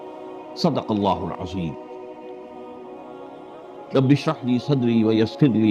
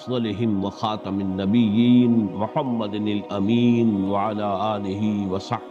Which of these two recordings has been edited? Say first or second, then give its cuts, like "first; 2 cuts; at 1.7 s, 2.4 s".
first; 2 cuts; at 1.7 s, 3.9 s